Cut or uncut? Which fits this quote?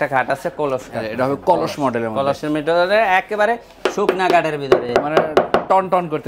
uncut